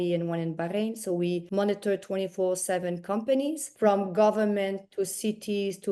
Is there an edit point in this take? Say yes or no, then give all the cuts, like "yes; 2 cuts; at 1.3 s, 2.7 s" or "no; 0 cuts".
no; 0 cuts